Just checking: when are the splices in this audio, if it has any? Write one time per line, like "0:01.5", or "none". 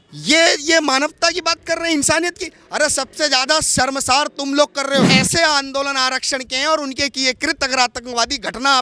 0:05.2